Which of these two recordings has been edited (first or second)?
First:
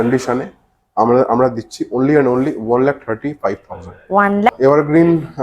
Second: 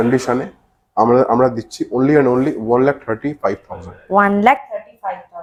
first